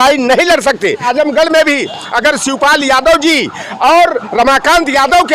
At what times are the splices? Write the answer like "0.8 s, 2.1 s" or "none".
1.1 s